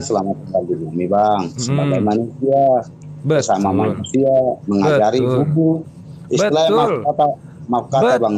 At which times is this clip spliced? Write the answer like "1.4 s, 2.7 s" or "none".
none